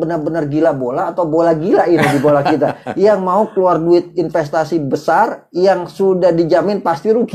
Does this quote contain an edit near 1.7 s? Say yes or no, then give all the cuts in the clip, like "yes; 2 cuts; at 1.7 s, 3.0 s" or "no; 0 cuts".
no; 0 cuts